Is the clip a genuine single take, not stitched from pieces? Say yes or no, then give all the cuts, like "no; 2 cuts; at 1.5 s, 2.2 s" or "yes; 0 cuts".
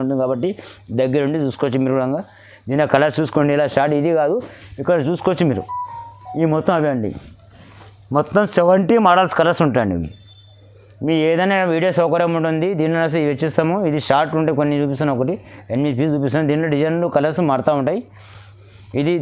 yes; 0 cuts